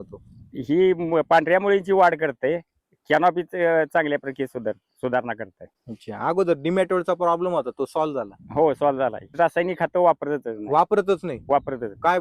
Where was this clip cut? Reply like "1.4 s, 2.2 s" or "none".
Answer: 9.3 s